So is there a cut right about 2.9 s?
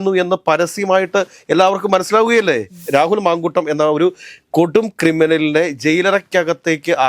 yes; 1 cut; at 2.9 s

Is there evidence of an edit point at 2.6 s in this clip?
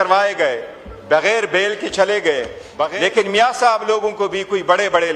yes; 1 cut; at 2.6 s

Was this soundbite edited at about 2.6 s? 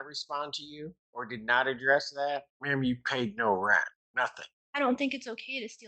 yes; 3 cuts; at 1.0 s, 2.6 s, 4.3 s

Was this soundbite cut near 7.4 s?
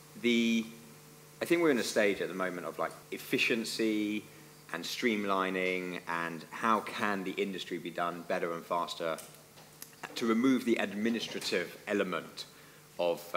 no; 1 cut; at 3.1 s

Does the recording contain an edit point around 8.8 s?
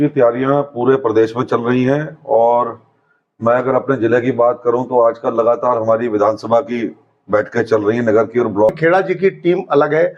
yes; 1 cut; at 8.8 s

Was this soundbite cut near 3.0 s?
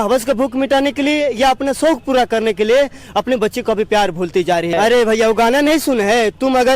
no; 1 cut; at 4.7 s

